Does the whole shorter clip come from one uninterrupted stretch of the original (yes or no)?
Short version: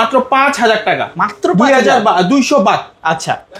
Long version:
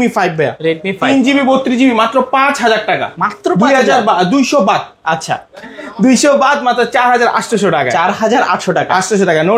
yes